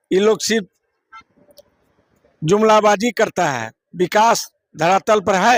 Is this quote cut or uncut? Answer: uncut